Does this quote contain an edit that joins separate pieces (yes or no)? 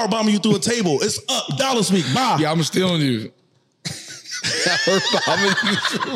no